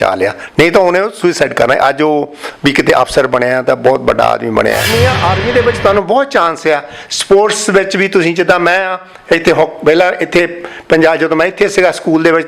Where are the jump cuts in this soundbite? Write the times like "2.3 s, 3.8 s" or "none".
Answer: 4.9 s